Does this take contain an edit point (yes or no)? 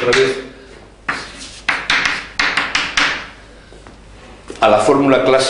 no